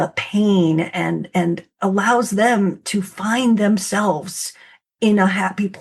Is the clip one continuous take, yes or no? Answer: yes